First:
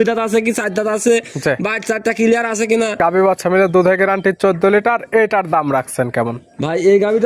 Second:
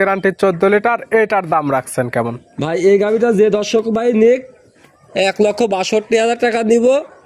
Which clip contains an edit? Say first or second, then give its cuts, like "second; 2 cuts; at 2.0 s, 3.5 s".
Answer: first; 1 cut; at 3.0 s